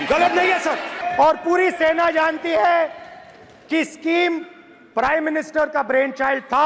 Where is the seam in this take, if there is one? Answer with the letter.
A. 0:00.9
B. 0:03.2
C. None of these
A